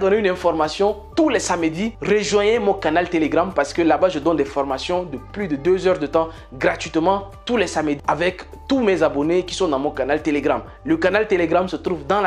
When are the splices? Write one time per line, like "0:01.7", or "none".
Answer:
0:01.9
0:08.0